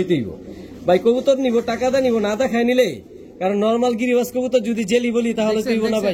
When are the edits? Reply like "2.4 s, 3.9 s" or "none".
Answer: none